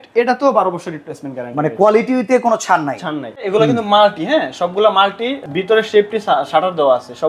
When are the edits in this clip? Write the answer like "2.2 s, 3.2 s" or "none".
3.4 s, 5.5 s